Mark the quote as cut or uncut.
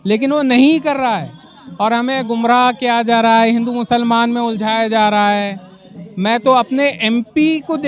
uncut